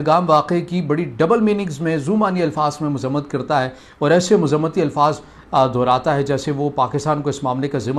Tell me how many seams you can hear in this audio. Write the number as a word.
zero